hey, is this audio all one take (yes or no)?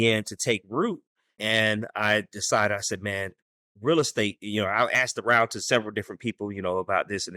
no